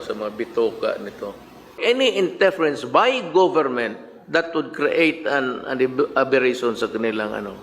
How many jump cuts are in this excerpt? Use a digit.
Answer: 1